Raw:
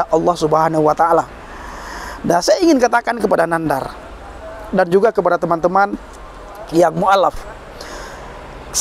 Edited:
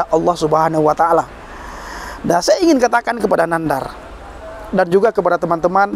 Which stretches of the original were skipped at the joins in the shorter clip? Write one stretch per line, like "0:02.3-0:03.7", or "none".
none